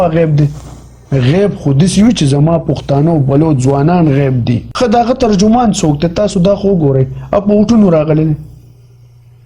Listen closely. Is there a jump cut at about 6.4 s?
no; 1 cut; at 4.7 s

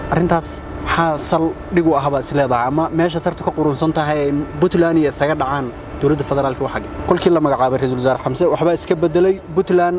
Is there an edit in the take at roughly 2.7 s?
no; 1 cut; at 6.9 s

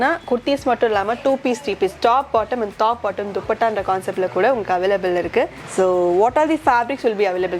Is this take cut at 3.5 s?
no; 1 cut; at 5.6 s

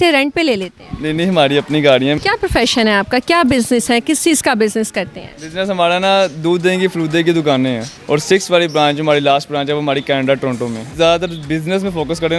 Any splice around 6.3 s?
no; 3 cuts; at 2.2 s, 7.9 s, 10.8 s

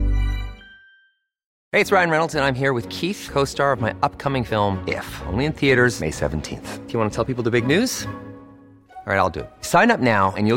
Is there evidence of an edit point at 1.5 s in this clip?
yes; 1 cut; at 1.5 s

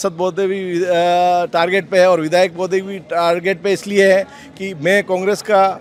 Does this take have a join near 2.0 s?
no; 0 cuts

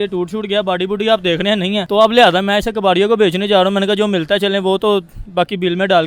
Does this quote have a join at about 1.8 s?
yes; 1 cut; at 1.8 s

